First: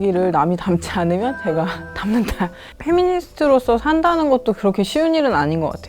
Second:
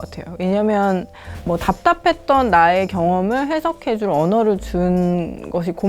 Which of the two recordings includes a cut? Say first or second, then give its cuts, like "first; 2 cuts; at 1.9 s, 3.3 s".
first; 1 cut; at 2.7 s